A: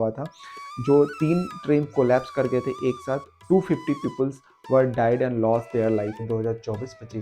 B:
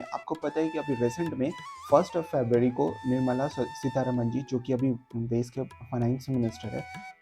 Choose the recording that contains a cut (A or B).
A